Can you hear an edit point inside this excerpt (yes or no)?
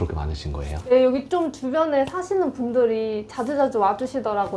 yes